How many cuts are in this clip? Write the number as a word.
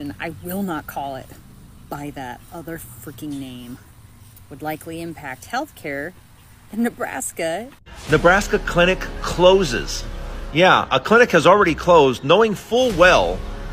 one